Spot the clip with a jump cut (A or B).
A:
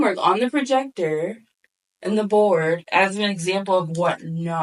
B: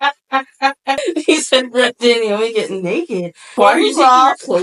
B